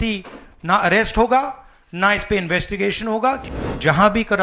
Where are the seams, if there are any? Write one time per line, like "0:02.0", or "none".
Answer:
0:03.5